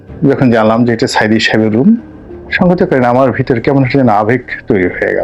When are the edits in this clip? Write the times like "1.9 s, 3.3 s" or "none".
none